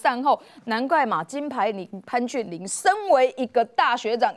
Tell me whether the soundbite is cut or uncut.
uncut